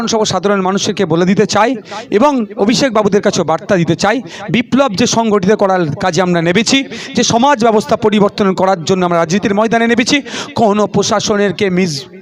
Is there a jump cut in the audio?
no; 0 cuts

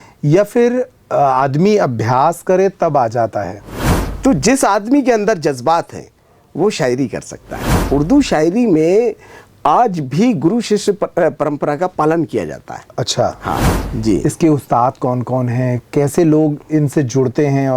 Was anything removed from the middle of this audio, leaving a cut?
yes; 3 cuts; at 4.0 s, 7.8 s, 13.8 s

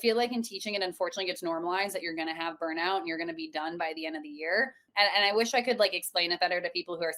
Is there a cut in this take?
yes; 1 cut; at 4.8 s

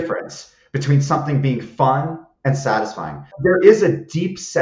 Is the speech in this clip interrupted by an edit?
yes; 1 cut; at 3.4 s

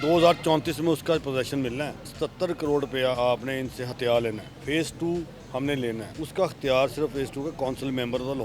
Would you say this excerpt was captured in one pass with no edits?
no; 3 cuts; at 2.1 s, 4.5 s, 6.1 s

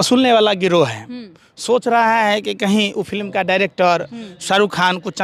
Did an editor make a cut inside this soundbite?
no; 0 cuts

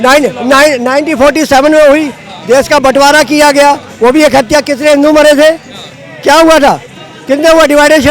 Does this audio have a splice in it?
no; 0 cuts

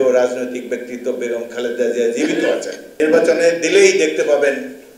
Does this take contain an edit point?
yes; 1 cut; at 2.8 s

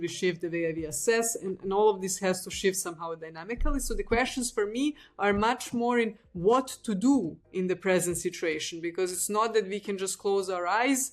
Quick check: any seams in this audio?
no; 0 cuts

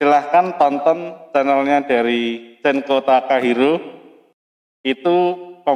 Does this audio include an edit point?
no; 0 cuts

